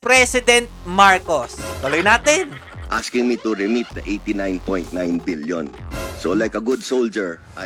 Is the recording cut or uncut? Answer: uncut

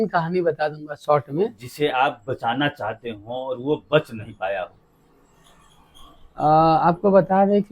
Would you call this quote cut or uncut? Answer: cut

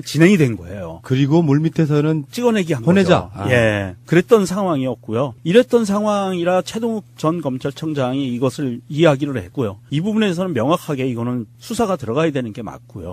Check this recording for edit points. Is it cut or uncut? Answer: uncut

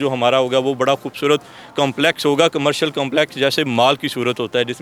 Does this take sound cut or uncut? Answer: uncut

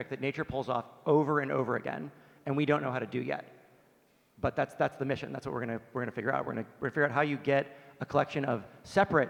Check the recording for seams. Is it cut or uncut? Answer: uncut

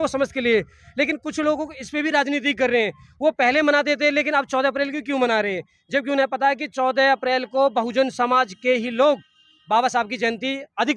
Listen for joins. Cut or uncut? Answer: uncut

